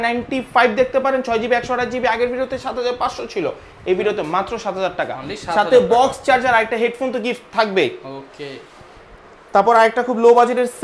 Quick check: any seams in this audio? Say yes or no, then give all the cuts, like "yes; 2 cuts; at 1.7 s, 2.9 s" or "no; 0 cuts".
no; 0 cuts